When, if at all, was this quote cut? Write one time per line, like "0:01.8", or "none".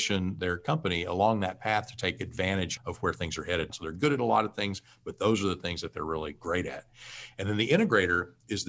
0:02.7
0:03.7